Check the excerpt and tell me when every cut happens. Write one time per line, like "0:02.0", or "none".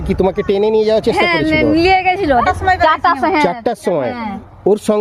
0:02.4